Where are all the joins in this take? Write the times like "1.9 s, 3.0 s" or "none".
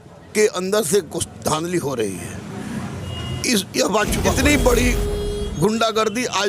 4.3 s